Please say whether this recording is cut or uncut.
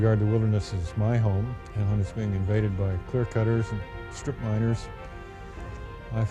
cut